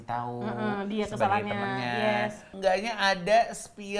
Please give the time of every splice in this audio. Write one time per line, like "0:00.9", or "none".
0:02.5